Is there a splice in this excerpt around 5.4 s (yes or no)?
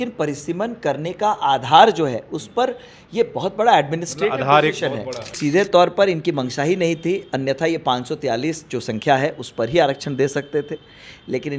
yes